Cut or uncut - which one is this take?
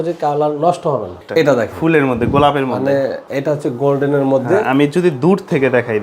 cut